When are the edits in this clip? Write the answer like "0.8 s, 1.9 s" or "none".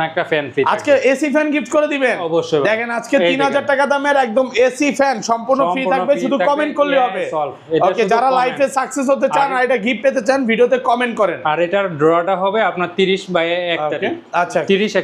none